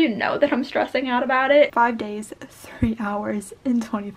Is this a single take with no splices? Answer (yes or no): no